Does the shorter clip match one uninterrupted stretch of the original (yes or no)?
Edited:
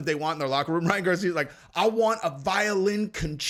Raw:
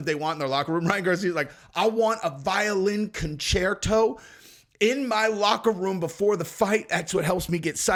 yes